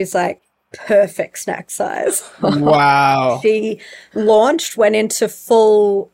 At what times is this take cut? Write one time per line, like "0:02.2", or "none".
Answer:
0:03.2